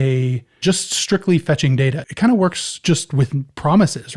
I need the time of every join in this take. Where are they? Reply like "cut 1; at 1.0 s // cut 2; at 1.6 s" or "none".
cut 1; at 2.0 s